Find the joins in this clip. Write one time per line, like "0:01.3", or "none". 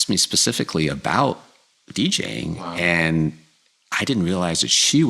none